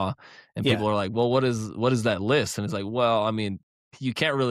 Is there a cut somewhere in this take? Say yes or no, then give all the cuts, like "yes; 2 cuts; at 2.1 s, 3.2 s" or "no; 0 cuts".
no; 0 cuts